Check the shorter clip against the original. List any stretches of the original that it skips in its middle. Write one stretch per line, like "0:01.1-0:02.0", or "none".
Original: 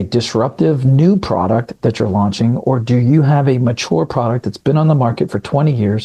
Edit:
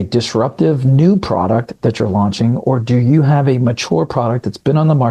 none